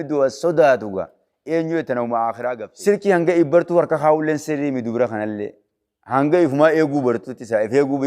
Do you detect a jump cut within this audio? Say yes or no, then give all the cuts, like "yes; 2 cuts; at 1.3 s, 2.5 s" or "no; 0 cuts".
yes; 1 cut; at 2.7 s